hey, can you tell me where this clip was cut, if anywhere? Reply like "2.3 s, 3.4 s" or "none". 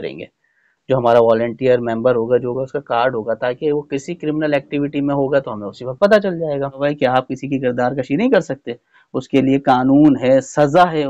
6.8 s